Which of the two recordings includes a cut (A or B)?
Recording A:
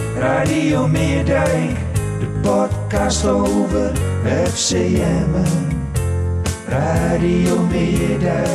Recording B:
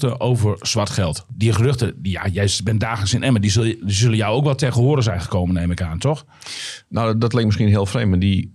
B